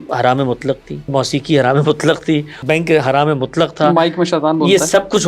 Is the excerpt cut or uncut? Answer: cut